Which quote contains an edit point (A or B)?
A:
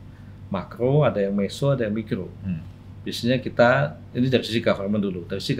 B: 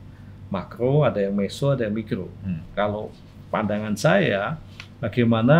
B